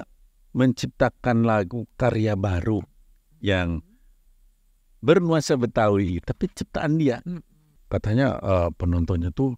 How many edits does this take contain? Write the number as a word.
one